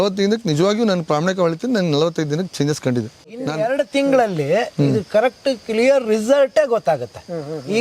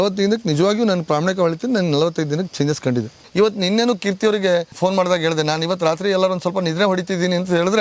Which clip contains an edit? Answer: second; 2 cuts; at 3.2 s, 4.7 s

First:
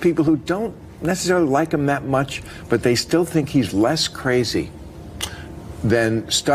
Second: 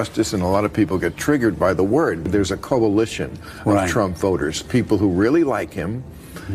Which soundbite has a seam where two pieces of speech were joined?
second; 1 cut; at 2.0 s

